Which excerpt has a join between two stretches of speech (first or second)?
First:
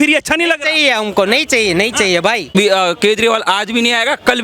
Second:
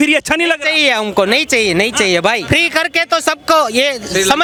first